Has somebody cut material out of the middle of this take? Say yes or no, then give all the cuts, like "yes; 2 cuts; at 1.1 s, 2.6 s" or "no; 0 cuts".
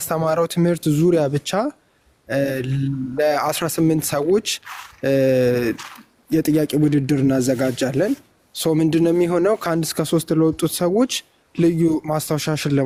no; 0 cuts